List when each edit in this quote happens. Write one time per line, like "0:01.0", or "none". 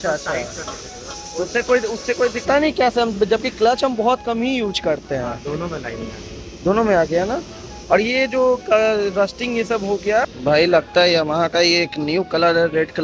0:02.5
0:10.3